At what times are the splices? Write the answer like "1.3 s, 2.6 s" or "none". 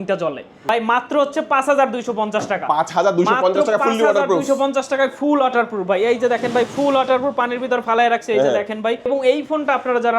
0.7 s, 9.1 s